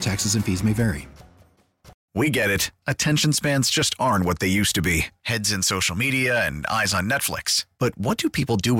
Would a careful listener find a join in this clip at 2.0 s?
yes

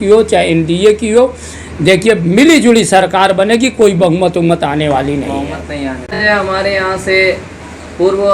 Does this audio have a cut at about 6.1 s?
yes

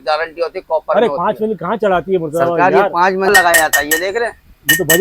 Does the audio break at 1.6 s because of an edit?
no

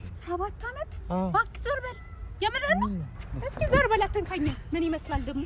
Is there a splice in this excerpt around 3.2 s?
yes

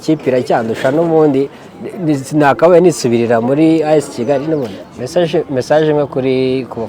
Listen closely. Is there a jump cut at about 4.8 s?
yes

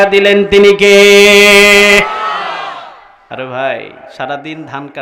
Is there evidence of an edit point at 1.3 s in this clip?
no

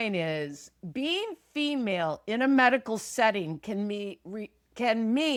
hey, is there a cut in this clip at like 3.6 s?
no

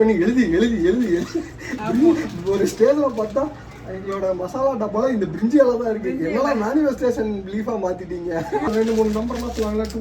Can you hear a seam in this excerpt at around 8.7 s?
yes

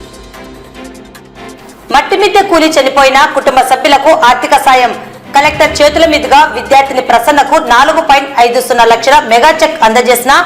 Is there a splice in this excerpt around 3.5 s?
no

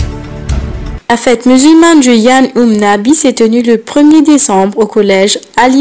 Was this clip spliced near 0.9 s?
yes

